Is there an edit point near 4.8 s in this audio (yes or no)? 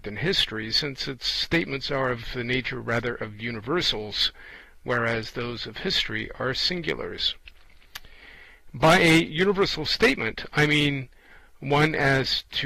no